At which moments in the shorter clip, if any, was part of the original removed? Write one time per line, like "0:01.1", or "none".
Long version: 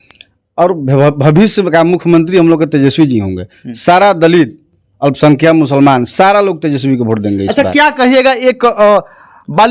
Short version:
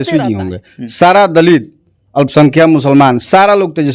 none

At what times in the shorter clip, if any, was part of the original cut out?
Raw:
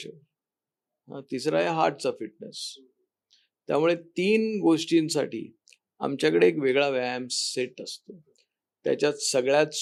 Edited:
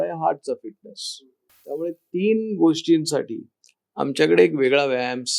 0:01.8

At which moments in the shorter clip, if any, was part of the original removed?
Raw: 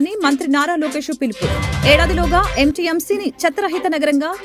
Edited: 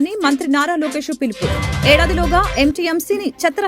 none

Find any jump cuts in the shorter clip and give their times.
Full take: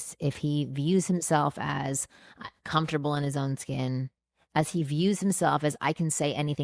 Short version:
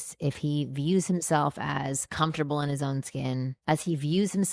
0:02.1
0:03.5

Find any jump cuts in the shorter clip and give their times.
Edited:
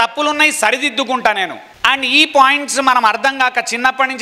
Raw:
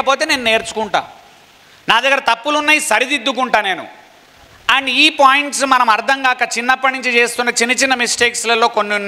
0:01.6

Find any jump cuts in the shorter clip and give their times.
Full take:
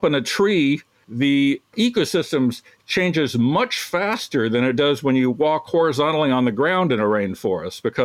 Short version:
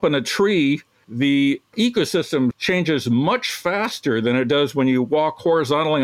0:02.6

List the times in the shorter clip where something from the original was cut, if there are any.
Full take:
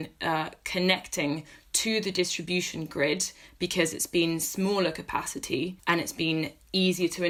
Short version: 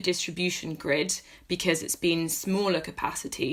none

